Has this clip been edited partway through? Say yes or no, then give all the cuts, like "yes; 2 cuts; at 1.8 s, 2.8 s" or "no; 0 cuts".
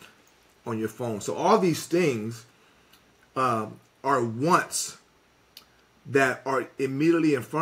no; 0 cuts